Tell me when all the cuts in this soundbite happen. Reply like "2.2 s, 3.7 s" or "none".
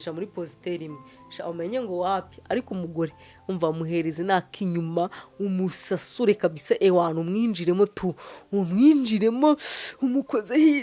none